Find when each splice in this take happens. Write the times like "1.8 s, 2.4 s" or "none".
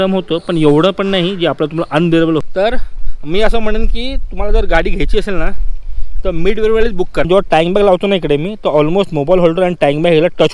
2.4 s, 7.3 s